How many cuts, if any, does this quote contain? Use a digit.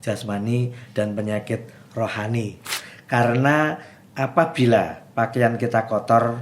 1